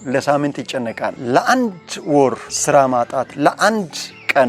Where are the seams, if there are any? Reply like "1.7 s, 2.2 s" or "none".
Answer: 1.1 s